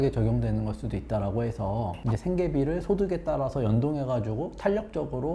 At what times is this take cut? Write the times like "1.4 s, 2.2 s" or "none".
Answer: none